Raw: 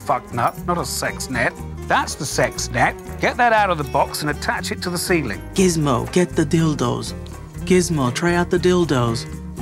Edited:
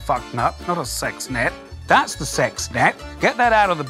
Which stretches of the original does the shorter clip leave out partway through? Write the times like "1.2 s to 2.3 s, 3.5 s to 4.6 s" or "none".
none